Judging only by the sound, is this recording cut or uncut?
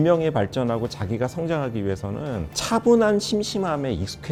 uncut